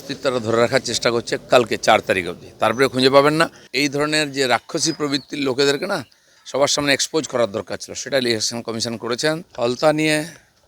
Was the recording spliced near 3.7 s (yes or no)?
yes